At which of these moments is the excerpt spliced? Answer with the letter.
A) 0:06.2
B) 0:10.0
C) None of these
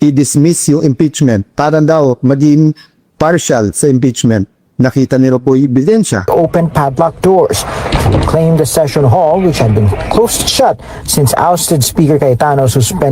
A